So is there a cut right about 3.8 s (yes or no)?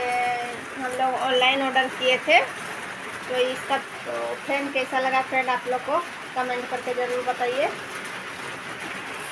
yes